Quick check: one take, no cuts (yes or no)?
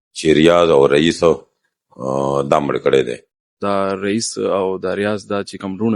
no